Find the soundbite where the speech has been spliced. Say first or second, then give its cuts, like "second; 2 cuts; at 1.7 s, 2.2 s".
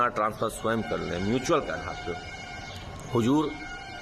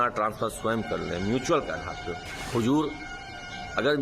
second; 1 cut; at 2.3 s